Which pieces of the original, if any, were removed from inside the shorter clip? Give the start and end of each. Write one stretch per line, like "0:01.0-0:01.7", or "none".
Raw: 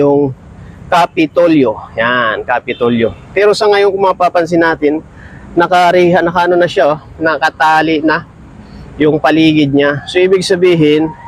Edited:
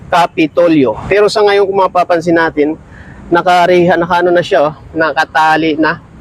0:01.8-0:03.3